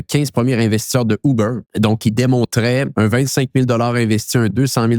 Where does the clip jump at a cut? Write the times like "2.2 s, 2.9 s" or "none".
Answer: 1.6 s, 2.9 s